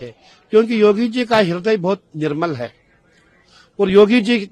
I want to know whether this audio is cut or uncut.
uncut